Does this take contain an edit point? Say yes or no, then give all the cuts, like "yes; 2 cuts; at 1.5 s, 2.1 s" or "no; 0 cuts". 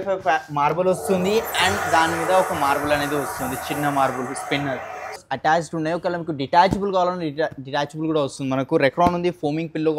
yes; 1 cut; at 5.2 s